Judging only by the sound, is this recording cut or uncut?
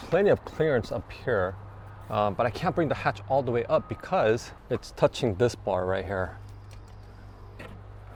uncut